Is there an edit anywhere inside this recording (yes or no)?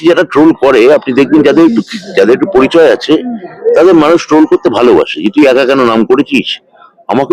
no